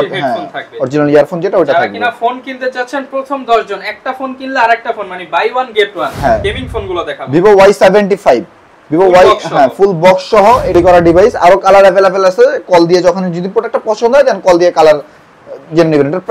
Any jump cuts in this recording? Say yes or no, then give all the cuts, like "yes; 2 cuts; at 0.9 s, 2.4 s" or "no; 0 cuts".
yes; 2 cuts; at 6.4 s, 10.7 s